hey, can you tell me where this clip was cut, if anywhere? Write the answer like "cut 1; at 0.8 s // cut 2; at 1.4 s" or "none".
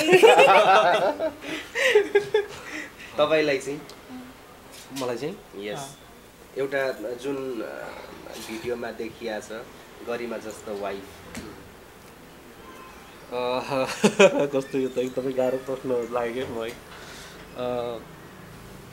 none